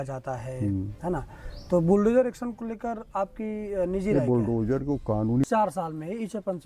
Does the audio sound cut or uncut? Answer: cut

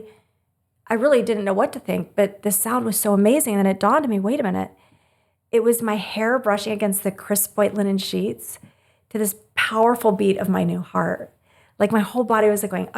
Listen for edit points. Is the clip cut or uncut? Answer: uncut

